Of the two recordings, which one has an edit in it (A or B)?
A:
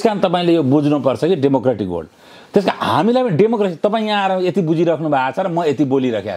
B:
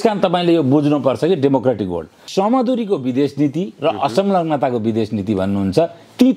B